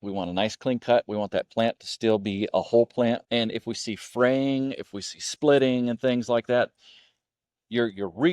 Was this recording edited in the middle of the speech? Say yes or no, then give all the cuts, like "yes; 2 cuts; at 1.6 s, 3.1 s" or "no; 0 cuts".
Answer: yes; 1 cut; at 3.2 s